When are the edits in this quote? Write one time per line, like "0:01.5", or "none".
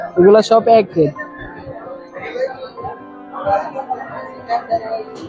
none